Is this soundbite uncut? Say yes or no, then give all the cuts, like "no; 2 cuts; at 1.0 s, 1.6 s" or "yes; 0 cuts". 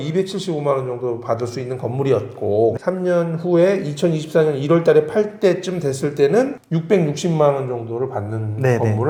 yes; 0 cuts